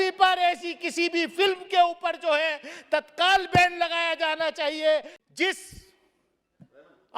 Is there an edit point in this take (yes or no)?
yes